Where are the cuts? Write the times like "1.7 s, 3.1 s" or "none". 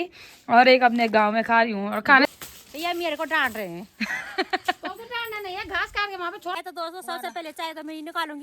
2.2 s, 6.6 s